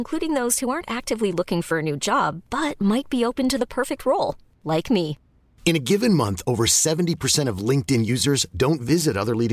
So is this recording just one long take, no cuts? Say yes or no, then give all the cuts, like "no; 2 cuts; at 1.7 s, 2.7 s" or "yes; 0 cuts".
yes; 0 cuts